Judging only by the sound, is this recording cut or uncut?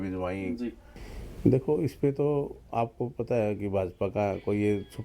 cut